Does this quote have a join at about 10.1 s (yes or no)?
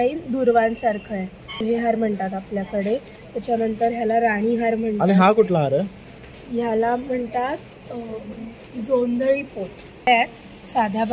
yes